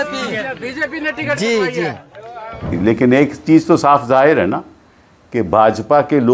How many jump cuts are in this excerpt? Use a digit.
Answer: 1